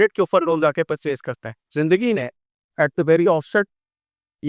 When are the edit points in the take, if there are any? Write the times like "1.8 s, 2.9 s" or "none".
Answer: 1.6 s